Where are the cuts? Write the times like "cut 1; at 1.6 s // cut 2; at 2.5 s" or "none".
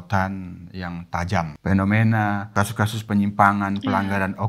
cut 1; at 1.5 s // cut 2; at 2.5 s